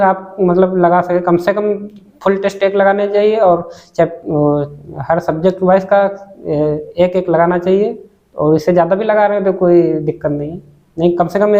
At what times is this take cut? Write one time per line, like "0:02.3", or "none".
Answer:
none